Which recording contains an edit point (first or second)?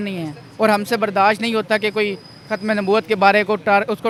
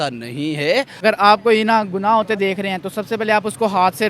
second